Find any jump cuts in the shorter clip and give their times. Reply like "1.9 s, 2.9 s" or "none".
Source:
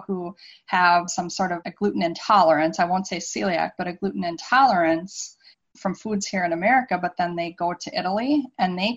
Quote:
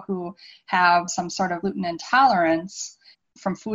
1.6 s